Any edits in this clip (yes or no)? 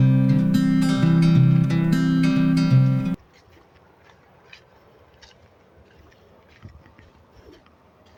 no